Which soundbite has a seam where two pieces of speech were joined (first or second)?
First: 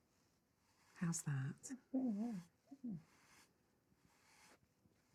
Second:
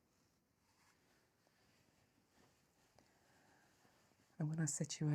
second